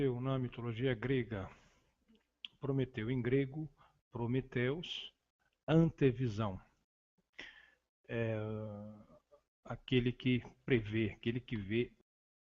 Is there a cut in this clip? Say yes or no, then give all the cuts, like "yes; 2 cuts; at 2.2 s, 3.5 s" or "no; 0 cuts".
yes; 1 cut; at 0.9 s